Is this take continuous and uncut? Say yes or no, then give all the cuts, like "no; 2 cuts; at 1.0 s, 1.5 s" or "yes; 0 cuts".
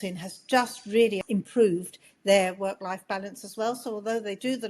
no; 1 cut; at 1.2 s